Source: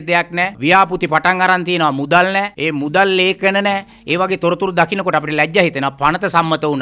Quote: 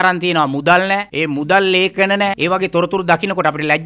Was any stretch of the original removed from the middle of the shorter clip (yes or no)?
yes